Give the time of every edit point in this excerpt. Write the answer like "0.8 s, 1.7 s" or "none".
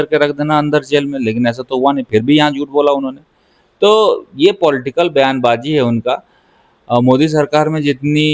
none